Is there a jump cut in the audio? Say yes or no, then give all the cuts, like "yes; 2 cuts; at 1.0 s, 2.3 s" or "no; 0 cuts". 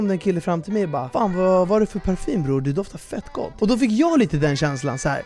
yes; 2 cuts; at 1.0 s, 3.5 s